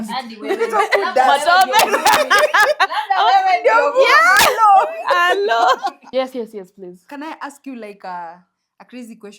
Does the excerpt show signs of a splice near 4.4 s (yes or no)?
no